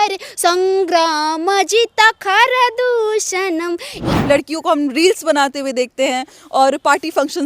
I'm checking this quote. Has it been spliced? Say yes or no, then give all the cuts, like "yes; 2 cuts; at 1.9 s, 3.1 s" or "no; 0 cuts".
yes; 1 cut; at 4.0 s